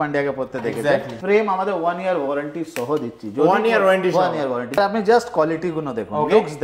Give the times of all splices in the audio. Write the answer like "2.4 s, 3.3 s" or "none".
1.1 s, 4.8 s